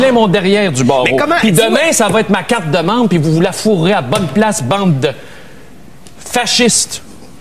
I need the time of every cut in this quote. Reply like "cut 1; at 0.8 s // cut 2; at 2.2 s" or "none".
cut 1; at 2.0 s

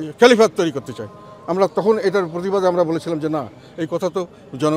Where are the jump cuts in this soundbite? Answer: none

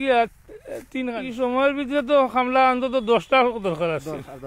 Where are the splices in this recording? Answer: cut 1; at 1.1 s

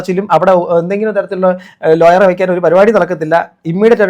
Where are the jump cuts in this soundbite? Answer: none

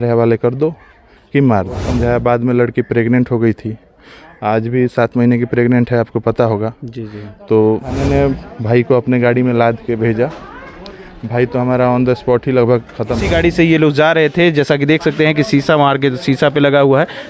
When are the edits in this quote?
cut 1; at 1.8 s // cut 2; at 8.0 s // cut 3; at 13.2 s

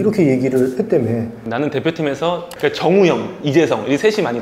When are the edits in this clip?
cut 1; at 1.4 s

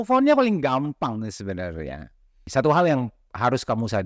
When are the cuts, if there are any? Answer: cut 1; at 2.4 s

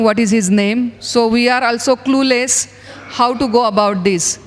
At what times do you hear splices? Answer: none

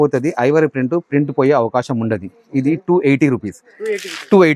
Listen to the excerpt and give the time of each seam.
none

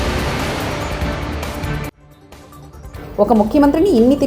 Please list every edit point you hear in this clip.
none

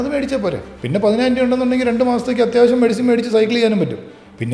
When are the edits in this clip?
none

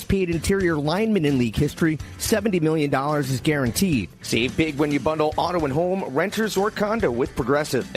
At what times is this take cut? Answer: cut 1; at 4.2 s

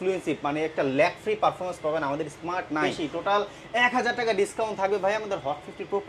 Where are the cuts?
cut 1; at 2.9 s

